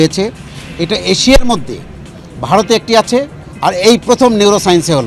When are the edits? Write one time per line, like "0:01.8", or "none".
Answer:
none